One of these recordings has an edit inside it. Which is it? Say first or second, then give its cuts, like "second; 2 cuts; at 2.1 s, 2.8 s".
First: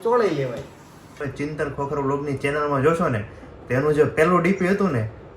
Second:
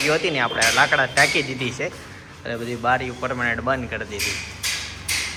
first; 1 cut; at 1.2 s